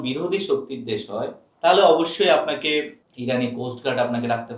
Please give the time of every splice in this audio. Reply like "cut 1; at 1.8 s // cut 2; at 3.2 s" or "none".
cut 1; at 1.4 s // cut 2; at 3.0 s

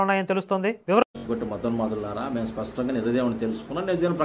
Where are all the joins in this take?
cut 1; at 1.0 s

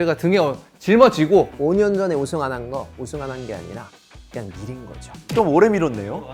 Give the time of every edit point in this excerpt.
cut 1; at 1.5 s // cut 2; at 5.3 s

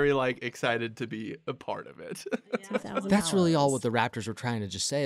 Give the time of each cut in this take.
cut 1; at 2.6 s

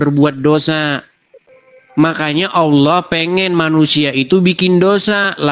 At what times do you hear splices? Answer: cut 1; at 2.0 s

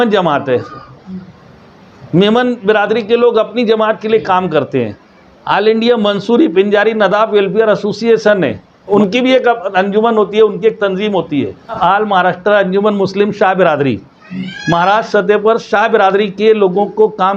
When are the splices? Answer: cut 1; at 8.9 s // cut 2; at 11.8 s

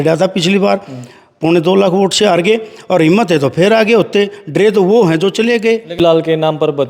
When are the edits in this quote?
cut 1; at 6.0 s

